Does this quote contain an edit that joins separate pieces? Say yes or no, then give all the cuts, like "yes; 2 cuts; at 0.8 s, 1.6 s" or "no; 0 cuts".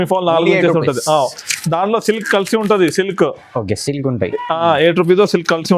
no; 0 cuts